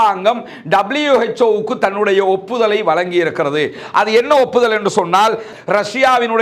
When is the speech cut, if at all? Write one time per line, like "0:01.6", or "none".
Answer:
0:05.5